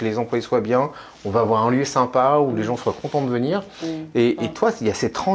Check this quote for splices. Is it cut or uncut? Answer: uncut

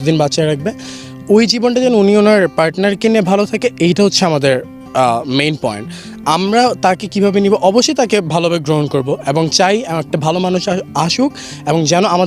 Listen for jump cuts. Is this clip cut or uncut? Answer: uncut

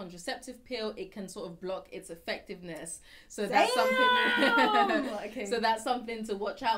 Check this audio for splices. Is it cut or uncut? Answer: uncut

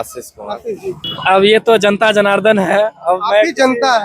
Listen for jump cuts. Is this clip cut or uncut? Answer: cut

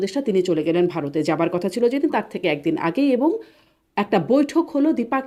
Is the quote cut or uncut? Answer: uncut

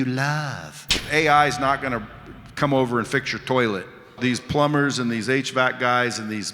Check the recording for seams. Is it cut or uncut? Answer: cut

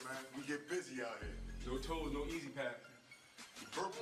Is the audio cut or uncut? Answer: uncut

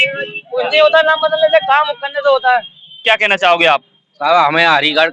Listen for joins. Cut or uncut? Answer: cut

